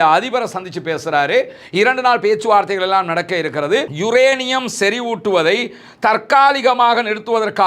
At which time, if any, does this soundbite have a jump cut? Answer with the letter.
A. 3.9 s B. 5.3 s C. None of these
A